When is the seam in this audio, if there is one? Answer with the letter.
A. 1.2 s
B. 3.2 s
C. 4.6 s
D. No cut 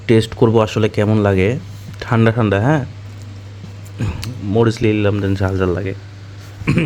D